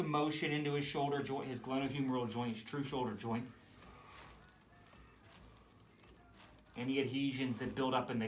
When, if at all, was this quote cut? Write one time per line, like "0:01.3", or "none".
none

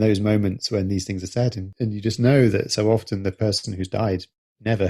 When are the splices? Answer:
0:01.7

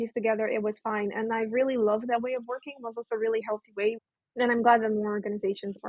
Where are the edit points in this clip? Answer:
0:04.0

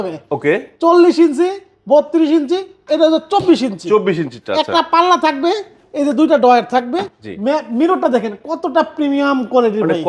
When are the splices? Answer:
none

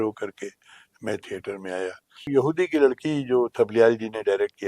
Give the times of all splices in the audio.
0:02.3

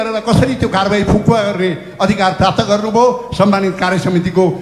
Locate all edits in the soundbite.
none

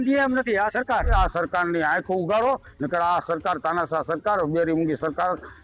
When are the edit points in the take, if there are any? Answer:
0:01.1

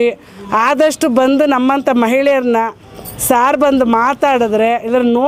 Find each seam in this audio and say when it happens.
none

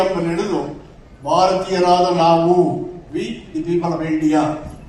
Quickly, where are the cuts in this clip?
none

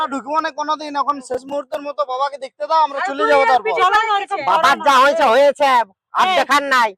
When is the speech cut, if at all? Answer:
none

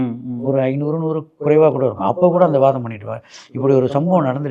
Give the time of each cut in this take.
none

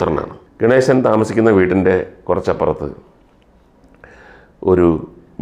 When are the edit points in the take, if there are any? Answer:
none

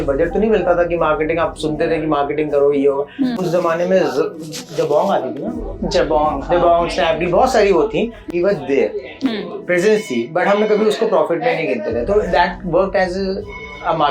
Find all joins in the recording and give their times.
0:03.4
0:08.2

